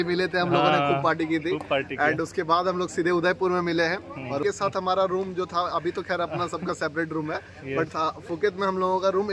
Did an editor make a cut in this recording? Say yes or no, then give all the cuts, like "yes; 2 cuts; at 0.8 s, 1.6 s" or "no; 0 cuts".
yes; 1 cut; at 4.4 s